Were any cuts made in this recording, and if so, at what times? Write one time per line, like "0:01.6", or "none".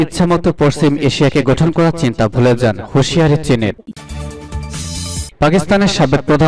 0:03.8
0:05.3